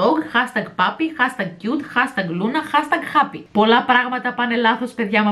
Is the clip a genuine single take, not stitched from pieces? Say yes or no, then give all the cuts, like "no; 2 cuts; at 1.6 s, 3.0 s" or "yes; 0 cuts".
no; 1 cut; at 3.4 s